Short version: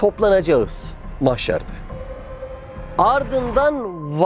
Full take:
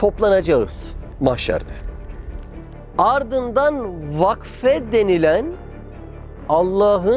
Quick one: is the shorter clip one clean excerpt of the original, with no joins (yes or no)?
yes